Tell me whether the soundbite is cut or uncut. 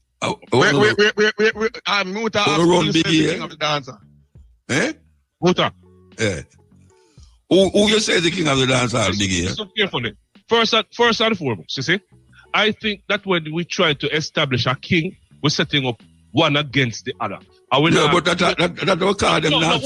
uncut